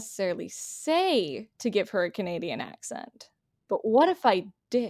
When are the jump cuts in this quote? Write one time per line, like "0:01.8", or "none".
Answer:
0:01.4